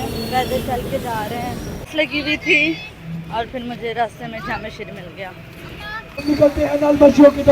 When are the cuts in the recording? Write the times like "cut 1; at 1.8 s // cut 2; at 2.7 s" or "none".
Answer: cut 1; at 1.8 s // cut 2; at 6.2 s